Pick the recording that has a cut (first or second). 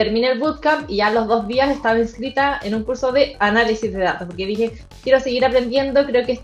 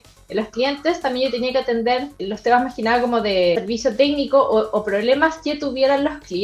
second